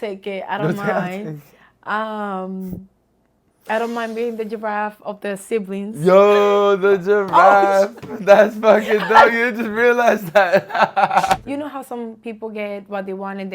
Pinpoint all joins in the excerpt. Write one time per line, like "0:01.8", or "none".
0:11.4